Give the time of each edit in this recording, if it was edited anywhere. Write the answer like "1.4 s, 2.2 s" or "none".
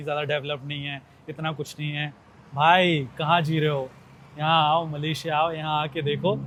none